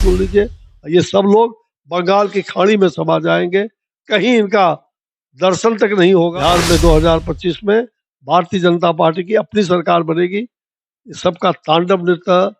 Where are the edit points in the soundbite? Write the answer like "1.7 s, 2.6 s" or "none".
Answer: 6.3 s